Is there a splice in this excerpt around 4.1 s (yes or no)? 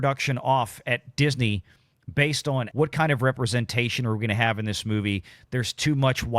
no